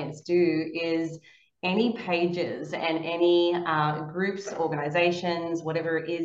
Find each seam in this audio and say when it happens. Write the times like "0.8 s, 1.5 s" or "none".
none